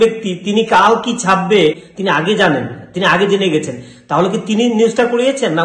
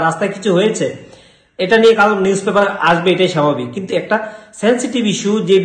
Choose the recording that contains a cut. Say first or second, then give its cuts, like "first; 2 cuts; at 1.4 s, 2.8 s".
first; 1 cut; at 1.9 s